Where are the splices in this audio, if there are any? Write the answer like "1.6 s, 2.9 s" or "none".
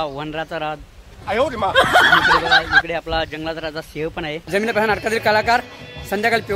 4.4 s